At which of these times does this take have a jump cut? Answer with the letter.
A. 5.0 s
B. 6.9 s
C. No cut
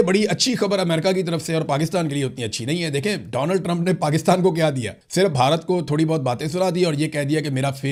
C